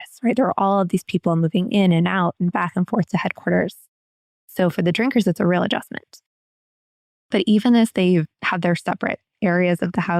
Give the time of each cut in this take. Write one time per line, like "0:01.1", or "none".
0:06.5